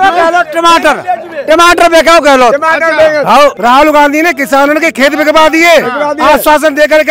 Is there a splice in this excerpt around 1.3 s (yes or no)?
no